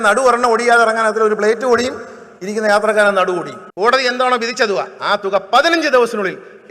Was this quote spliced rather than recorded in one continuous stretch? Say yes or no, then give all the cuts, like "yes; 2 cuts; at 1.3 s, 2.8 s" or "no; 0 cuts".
yes; 1 cut; at 3.6 s